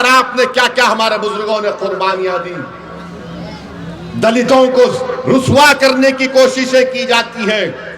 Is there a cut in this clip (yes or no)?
no